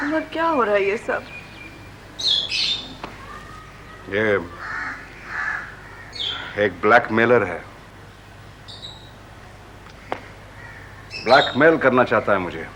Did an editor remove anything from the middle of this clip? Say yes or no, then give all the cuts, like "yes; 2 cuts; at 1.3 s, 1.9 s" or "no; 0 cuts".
no; 0 cuts